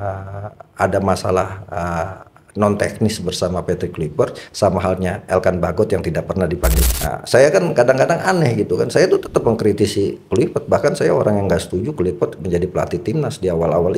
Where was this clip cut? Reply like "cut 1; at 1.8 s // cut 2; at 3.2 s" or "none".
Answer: cut 1; at 6.9 s

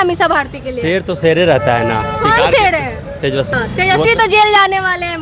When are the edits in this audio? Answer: cut 1; at 3.5 s

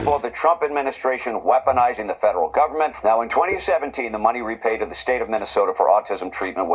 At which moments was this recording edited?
cut 1; at 2.9 s

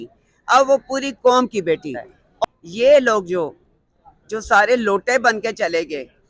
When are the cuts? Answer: cut 1; at 2.4 s

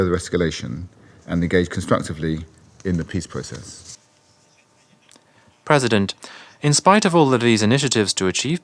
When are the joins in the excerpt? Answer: cut 1; at 4.0 s

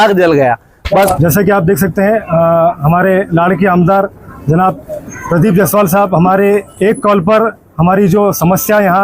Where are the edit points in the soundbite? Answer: cut 1; at 1.1 s

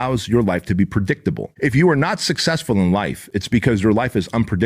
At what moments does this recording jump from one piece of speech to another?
cut 1; at 1.5 s

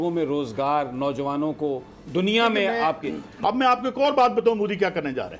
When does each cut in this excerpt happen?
cut 1; at 3.3 s

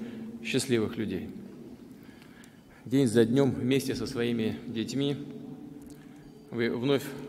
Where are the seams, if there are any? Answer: cut 1; at 4.3 s

